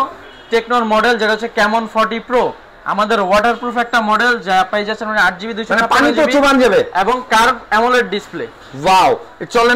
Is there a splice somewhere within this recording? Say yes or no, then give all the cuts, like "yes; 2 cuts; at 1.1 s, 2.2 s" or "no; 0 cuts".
no; 0 cuts